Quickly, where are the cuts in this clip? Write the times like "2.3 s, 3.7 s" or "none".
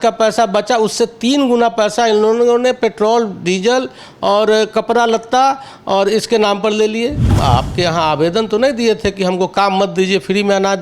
7.3 s

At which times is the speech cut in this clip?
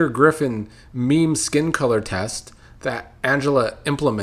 none

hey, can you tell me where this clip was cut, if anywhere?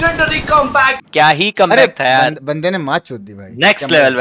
1.0 s

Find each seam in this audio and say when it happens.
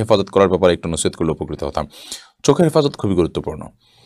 none

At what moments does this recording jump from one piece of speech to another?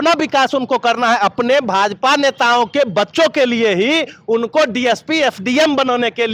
none

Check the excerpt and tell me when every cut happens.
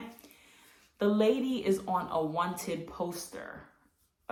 none

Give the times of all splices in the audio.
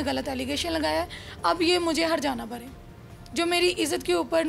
none

